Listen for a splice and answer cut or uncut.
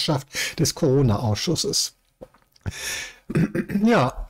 uncut